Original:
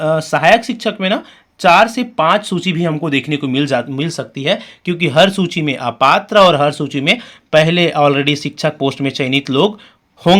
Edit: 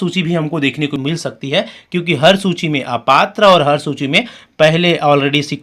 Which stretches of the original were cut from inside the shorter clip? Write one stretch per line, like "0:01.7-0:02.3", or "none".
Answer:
0:03.5-0:03.9